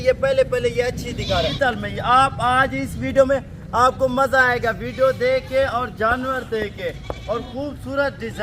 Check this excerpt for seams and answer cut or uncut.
cut